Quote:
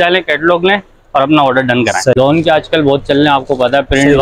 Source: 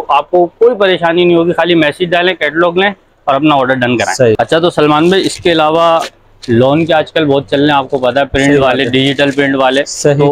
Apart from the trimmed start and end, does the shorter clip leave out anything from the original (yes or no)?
yes